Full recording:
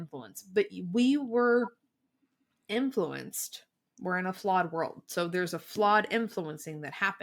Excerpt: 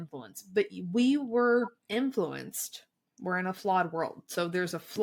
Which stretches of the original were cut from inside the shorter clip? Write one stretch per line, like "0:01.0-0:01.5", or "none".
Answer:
0:01.8-0:02.6